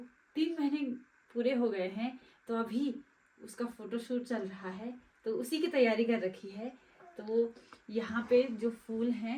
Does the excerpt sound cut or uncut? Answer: uncut